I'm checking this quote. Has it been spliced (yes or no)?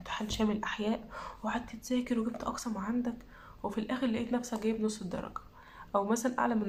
no